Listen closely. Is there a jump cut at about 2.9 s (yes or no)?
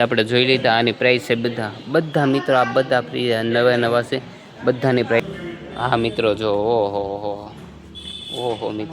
no